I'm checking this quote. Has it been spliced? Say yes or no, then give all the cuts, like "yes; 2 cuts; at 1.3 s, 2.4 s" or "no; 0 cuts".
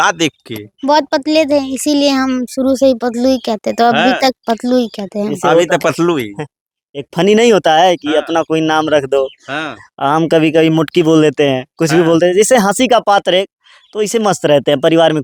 no; 0 cuts